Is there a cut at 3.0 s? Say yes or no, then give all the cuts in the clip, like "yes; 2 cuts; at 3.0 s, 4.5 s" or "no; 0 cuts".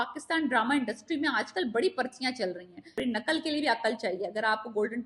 yes; 1 cut; at 3.0 s